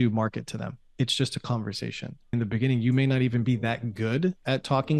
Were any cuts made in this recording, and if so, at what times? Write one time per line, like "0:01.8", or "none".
0:02.3